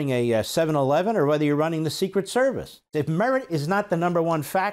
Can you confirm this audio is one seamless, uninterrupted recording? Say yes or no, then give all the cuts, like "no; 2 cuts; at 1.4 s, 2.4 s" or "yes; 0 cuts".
no; 1 cut; at 2.9 s